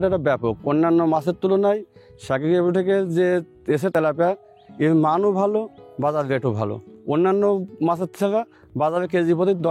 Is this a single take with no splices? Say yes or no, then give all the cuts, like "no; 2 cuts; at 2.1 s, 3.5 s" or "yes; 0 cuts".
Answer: yes; 0 cuts